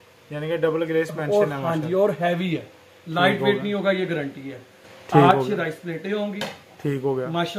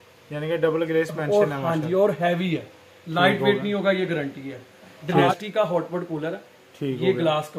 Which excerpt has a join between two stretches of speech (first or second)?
second